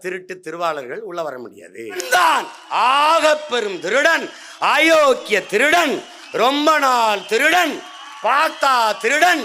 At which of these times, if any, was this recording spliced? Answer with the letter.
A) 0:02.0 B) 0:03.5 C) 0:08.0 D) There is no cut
A